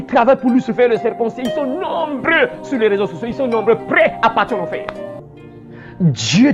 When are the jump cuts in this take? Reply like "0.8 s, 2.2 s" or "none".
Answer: 5.3 s